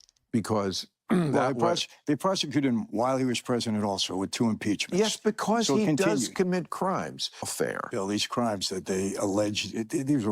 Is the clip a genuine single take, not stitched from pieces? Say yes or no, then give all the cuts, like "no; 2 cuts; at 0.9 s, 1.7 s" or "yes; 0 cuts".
no; 1 cut; at 7.5 s